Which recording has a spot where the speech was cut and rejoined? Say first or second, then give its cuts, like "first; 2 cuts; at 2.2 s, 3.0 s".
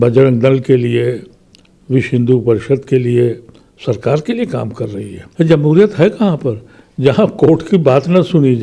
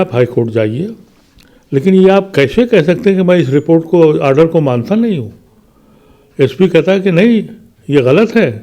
first; 1 cut; at 5.2 s